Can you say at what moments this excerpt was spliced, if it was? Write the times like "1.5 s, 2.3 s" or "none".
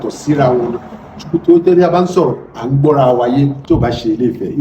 3.6 s